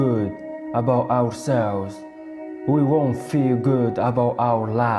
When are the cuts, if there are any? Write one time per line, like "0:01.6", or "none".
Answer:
none